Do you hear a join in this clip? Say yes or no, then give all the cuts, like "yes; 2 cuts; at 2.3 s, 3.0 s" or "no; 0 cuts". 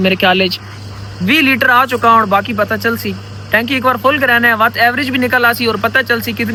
no; 0 cuts